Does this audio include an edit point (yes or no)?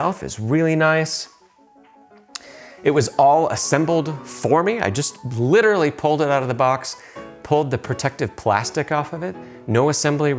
no